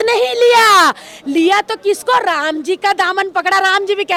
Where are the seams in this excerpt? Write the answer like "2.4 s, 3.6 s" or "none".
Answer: none